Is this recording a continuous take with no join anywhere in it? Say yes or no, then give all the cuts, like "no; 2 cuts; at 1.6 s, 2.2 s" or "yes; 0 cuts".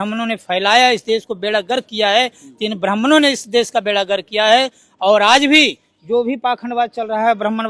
yes; 0 cuts